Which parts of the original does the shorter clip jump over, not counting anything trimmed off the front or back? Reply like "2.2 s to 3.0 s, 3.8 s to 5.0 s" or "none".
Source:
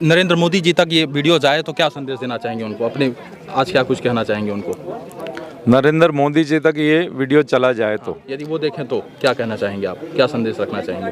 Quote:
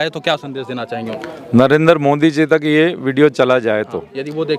2.7 s to 5.3 s